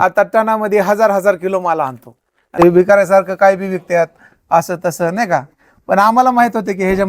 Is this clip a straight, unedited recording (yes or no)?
no